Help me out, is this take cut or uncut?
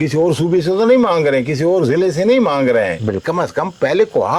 uncut